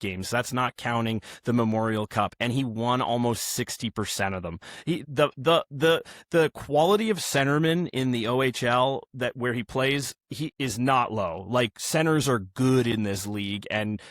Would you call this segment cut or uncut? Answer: cut